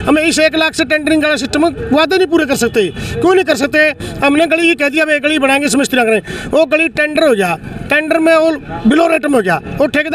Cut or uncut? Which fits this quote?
uncut